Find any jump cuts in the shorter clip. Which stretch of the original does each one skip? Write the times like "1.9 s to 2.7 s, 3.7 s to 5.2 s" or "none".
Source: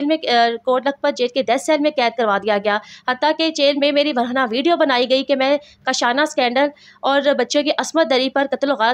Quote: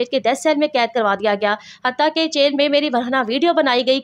none